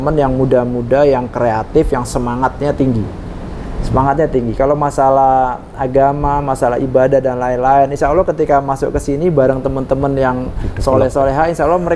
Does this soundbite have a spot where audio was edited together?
no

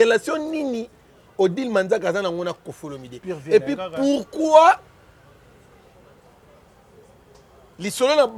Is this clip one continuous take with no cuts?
yes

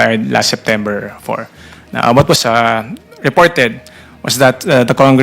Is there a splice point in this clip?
yes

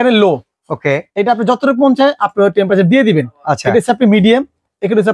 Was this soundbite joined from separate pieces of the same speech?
no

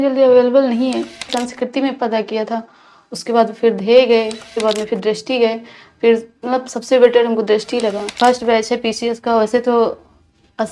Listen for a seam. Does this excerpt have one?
yes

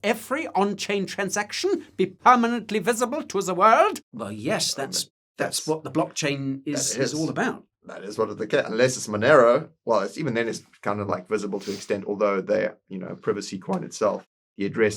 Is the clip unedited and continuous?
yes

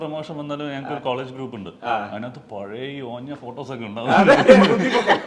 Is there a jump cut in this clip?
no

